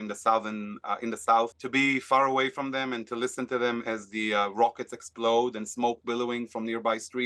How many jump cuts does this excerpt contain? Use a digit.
1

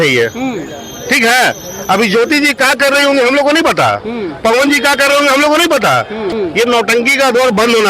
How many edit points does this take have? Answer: 1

